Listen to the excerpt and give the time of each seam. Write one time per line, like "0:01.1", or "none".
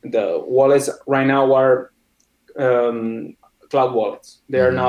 none